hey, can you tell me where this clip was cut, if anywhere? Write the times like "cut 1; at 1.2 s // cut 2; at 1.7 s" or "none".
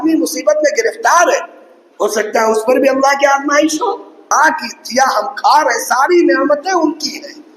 cut 1; at 4.3 s